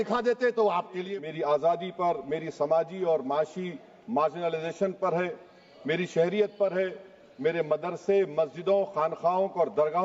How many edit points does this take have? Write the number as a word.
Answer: one